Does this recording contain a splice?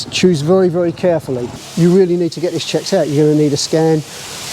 yes; 1 cut; at 1.6 s

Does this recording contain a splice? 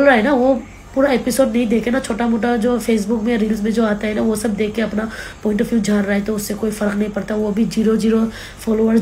no; 0 cuts

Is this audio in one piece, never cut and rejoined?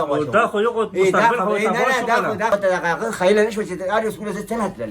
no; 1 cut; at 2.5 s

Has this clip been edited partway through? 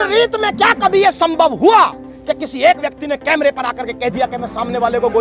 no; 0 cuts

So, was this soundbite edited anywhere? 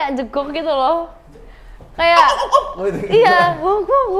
no; 0 cuts

